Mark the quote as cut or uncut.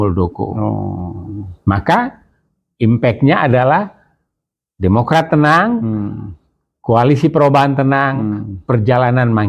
uncut